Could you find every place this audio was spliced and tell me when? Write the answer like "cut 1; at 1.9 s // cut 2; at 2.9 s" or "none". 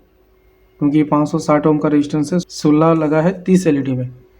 cut 1; at 2.4 s